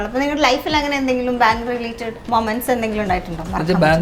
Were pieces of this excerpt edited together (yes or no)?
yes